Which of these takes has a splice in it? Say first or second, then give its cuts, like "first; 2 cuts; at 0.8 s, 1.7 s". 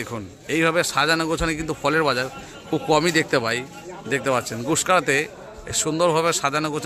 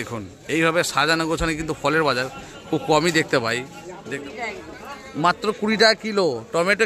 second; 1 cut; at 4.0 s